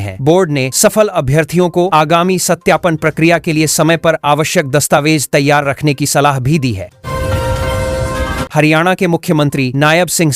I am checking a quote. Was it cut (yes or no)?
yes